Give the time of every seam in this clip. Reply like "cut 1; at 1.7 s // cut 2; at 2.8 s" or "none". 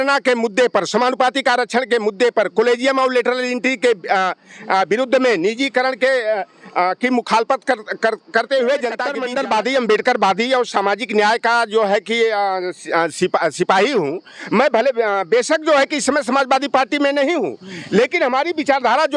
cut 1; at 9.1 s